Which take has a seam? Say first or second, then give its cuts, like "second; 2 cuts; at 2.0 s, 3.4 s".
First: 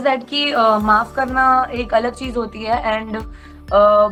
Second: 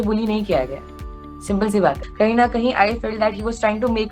second; 1 cut; at 2.1 s